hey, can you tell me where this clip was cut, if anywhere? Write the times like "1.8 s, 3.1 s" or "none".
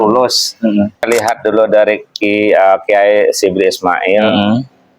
1.1 s